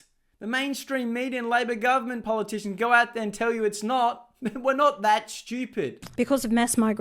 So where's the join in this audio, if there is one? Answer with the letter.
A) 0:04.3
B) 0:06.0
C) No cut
B